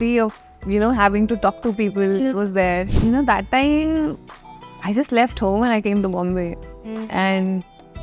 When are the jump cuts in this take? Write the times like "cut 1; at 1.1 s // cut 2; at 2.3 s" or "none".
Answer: cut 1; at 2.9 s